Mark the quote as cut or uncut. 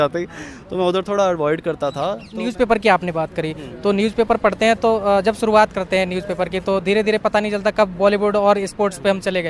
cut